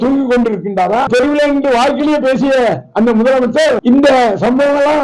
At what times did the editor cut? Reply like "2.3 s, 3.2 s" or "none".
1.1 s, 3.8 s